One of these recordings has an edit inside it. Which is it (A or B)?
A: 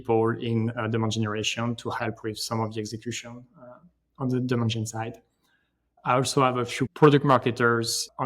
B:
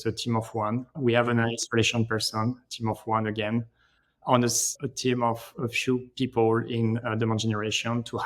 A